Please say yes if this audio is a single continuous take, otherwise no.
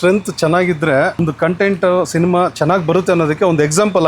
no